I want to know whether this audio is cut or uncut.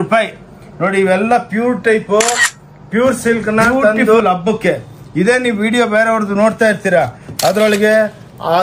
cut